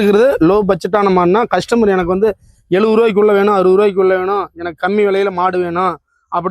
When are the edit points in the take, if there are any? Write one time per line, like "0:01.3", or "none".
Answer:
none